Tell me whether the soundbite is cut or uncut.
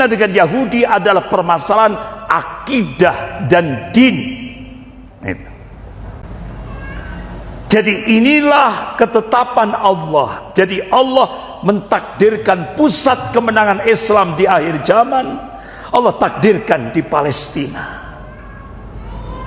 cut